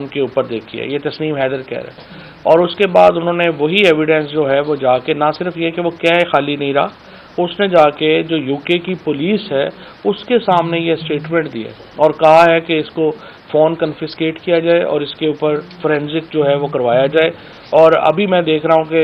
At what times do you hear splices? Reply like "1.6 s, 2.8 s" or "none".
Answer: none

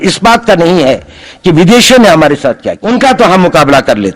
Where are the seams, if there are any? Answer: 2.7 s

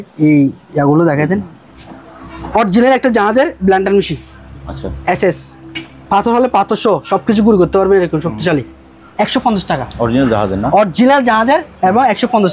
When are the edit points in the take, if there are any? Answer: 1.7 s, 9.0 s

